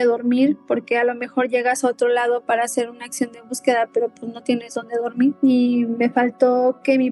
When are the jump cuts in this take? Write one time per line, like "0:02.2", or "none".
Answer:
0:05.4